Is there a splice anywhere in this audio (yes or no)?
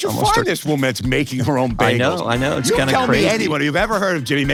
no